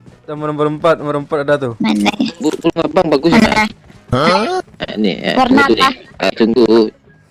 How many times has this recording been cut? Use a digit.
2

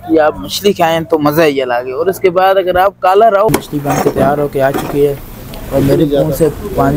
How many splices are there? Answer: 1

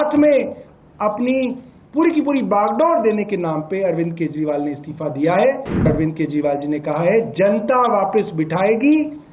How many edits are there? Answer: 1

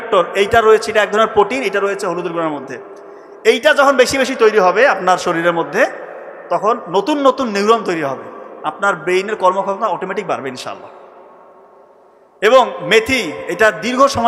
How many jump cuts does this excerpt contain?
0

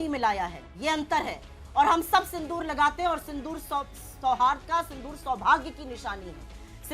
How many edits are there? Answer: 0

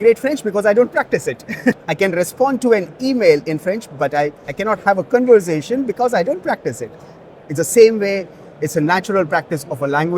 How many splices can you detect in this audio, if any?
1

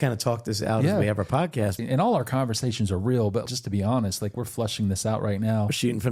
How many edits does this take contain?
2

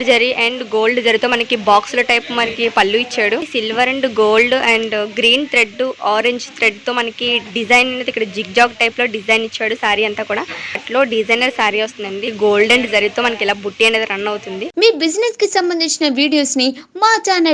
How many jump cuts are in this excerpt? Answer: 4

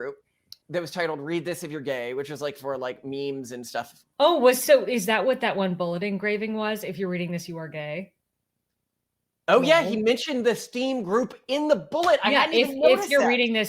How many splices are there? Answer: 1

